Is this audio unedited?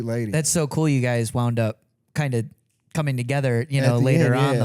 yes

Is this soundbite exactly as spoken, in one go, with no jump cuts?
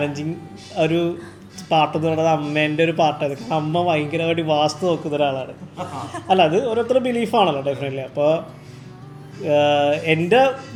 yes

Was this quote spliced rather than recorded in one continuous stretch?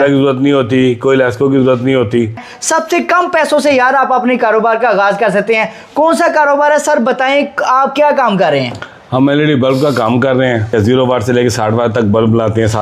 yes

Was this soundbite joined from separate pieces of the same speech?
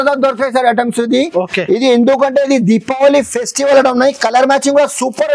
no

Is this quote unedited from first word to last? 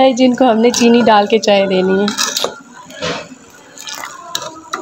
yes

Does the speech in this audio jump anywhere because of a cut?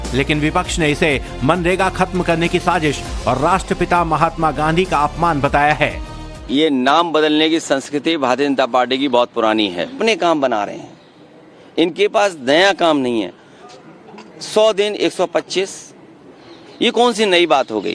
no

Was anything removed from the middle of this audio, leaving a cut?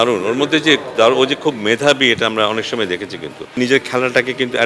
yes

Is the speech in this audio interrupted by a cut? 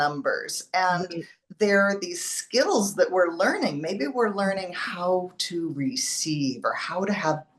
no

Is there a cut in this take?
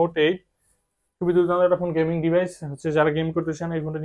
no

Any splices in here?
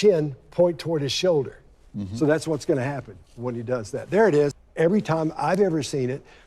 yes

